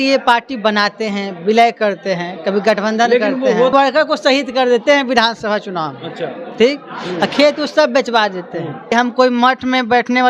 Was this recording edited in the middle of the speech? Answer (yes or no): yes